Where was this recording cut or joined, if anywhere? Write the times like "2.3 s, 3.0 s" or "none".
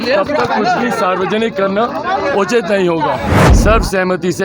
3.4 s